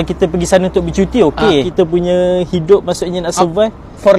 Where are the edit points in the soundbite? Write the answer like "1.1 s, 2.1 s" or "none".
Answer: 1.7 s